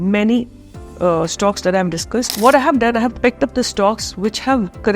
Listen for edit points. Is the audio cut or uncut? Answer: cut